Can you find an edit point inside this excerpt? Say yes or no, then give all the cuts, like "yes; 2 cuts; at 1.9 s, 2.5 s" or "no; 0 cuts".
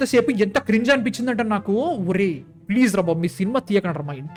no; 0 cuts